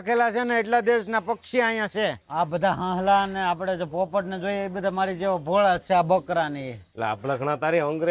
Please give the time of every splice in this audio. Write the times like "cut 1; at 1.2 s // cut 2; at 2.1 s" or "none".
cut 1; at 2.2 s // cut 2; at 6.9 s